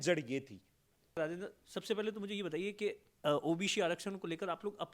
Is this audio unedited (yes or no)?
no